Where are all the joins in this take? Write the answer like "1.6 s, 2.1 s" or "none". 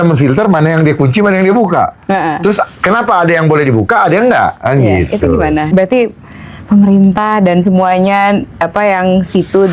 5.7 s